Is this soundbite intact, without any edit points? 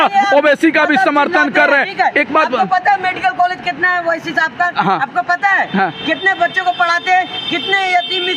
yes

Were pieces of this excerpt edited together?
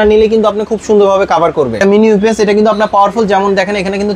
yes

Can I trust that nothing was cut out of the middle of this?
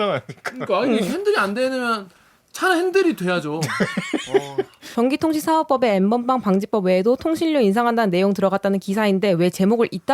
no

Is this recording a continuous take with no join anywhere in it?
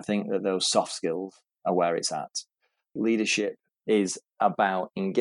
no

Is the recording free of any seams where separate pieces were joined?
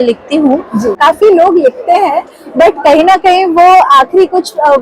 no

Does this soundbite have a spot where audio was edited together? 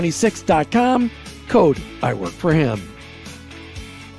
yes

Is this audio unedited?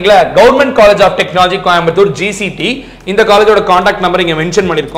yes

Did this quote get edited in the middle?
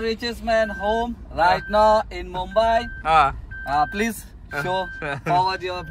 no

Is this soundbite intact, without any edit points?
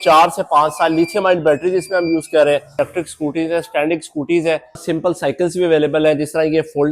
no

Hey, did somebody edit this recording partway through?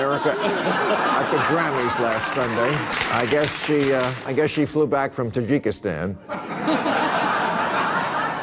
yes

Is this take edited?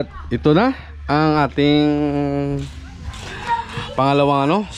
no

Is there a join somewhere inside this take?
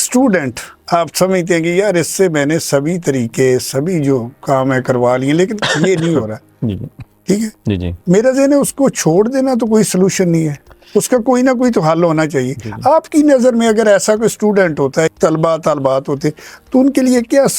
yes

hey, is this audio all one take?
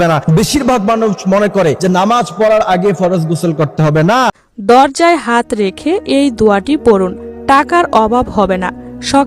no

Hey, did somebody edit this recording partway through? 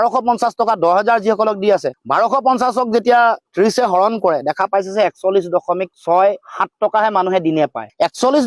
no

